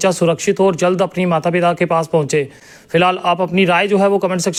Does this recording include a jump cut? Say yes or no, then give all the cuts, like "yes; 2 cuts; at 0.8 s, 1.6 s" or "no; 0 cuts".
no; 0 cuts